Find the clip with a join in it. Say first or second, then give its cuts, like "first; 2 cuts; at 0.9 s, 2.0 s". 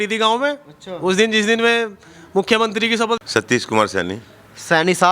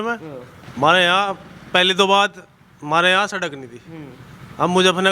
first; 1 cut; at 3.2 s